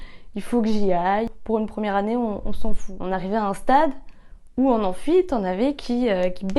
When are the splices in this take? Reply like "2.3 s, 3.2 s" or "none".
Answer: 1.3 s, 2.9 s